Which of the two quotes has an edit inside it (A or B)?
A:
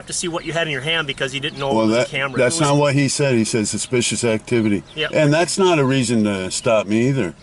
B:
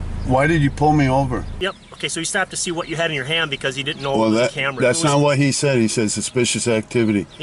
B